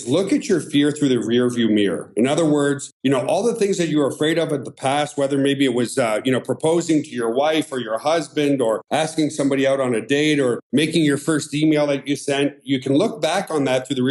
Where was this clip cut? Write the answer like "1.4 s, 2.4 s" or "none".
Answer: 8.8 s, 10.6 s